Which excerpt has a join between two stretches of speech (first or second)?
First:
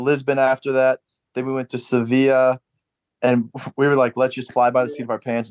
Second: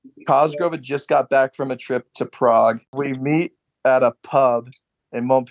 second